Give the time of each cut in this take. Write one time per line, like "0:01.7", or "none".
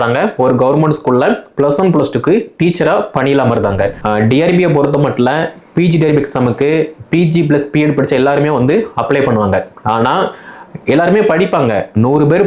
0:04.0